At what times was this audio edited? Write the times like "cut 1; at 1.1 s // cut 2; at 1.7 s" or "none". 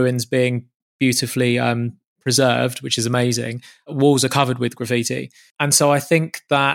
cut 1; at 3.9 s // cut 2; at 5.4 s